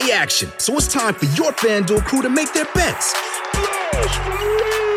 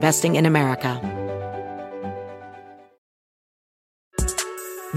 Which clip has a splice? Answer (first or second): second